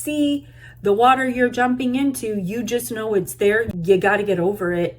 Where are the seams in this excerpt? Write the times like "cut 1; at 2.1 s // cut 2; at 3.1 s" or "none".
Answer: cut 1; at 3.7 s